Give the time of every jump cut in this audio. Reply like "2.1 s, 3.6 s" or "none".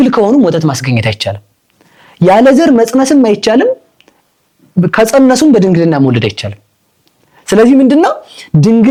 none